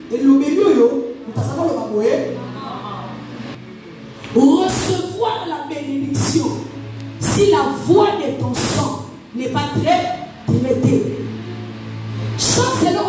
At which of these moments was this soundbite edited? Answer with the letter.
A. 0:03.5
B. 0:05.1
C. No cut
A